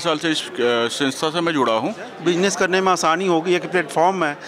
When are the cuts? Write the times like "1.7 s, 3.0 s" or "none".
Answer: 2.1 s